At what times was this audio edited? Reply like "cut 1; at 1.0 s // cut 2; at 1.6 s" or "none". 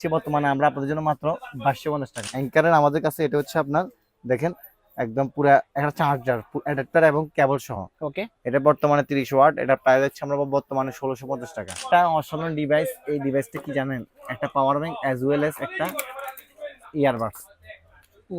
cut 1; at 2.2 s // cut 2; at 11.8 s